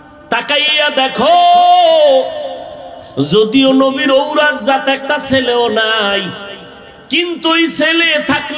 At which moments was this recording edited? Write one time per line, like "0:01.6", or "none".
none